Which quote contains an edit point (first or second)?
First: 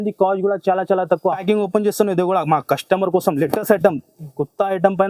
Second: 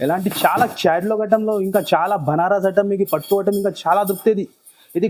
first